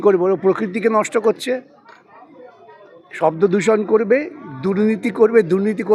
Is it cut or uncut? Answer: uncut